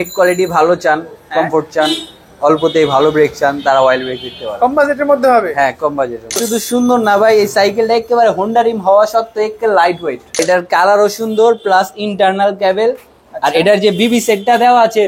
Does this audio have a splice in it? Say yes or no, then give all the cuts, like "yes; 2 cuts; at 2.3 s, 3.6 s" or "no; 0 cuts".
yes; 2 cuts; at 6.4 s, 10.4 s